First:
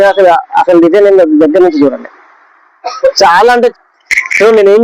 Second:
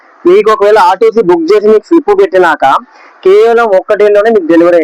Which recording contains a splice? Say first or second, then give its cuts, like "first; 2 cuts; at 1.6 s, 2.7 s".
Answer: first; 1 cut; at 3.7 s